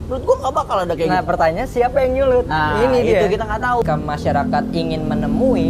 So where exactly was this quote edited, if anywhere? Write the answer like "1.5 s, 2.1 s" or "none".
3.8 s

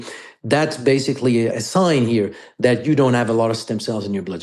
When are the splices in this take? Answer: 1.5 s

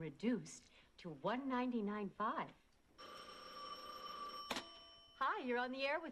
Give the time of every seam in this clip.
1.1 s

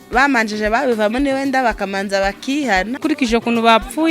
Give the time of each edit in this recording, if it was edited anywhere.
3.0 s

